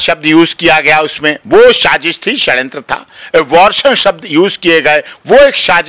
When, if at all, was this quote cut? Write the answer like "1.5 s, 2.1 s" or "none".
none